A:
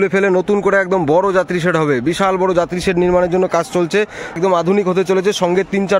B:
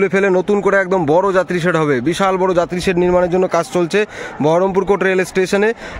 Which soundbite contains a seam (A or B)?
A